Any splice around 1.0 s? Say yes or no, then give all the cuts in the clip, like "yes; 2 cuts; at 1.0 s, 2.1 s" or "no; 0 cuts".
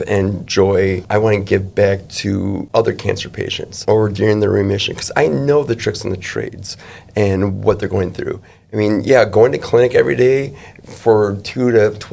yes; 3 cuts; at 1.0 s, 2.6 s, 3.8 s